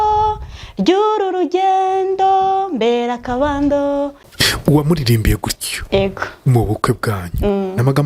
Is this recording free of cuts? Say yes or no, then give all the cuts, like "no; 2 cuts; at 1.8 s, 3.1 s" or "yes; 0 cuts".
no; 1 cut; at 4.3 s